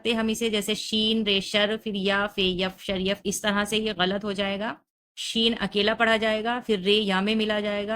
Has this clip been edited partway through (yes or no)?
no